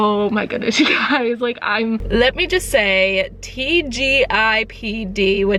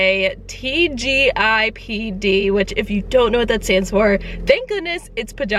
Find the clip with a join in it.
first; 1 cut; at 2.0 s

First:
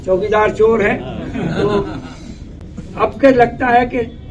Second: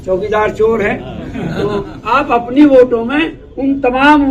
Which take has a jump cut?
second; 1 cut; at 2.0 s

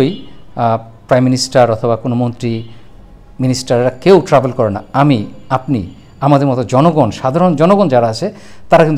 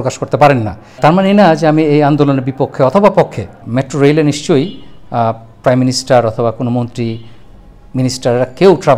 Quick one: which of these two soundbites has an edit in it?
second; 2 cuts; at 1.0 s, 3.6 s

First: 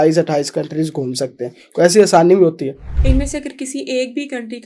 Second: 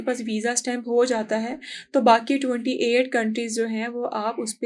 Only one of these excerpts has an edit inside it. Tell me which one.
first; 1 cut; at 2.9 s

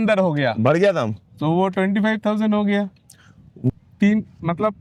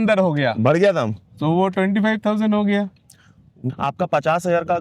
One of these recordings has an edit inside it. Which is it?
second; 1 cut; at 3.7 s

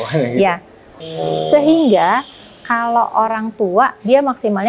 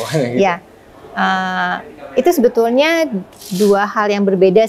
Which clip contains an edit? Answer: first; 1 cut; at 1.0 s

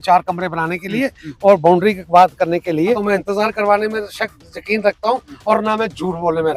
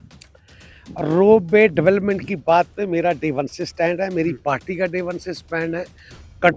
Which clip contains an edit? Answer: first; 1 cut; at 3.0 s

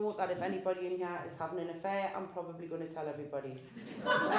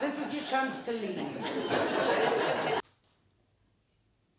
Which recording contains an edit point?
second; 1 cut; at 2.8 s

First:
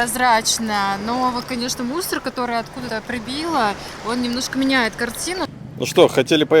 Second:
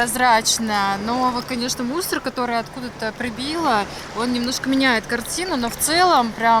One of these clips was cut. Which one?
first; 2 cuts; at 2.8 s, 5.5 s

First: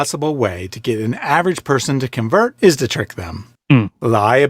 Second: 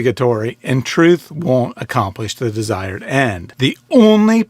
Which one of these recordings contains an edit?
second; 1 cut; at 3.4 s

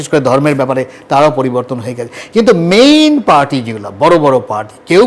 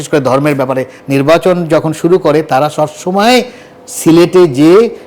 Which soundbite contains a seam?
second; 1 cut; at 0.9 s

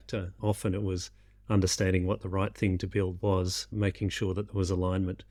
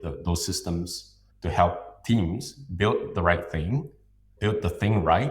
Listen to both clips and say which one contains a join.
second; 1 cut; at 4.3 s

